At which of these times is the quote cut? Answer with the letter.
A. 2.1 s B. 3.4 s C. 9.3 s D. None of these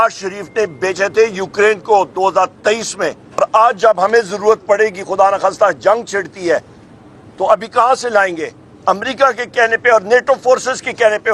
B